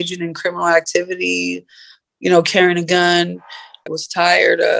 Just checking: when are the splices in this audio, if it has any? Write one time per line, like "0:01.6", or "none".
0:03.9